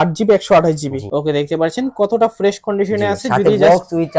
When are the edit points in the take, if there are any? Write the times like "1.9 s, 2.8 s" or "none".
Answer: 1.0 s